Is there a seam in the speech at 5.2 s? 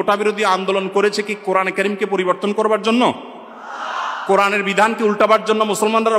no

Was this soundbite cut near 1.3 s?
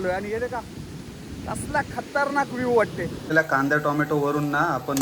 no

